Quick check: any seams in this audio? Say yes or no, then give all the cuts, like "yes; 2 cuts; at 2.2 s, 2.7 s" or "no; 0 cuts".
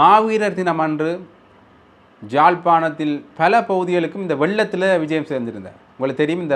no; 0 cuts